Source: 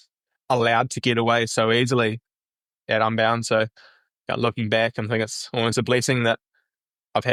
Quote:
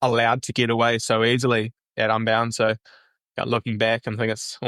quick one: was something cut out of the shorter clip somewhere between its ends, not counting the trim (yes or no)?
yes